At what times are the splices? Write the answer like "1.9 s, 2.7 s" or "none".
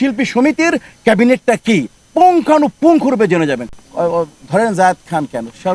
3.7 s